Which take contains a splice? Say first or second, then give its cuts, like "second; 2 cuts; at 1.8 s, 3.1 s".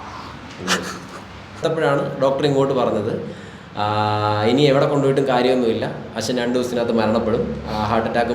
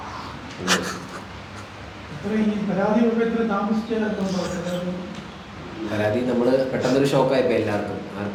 first; 1 cut; at 1.6 s